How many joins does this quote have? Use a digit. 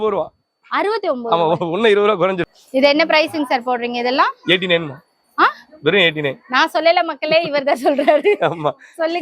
1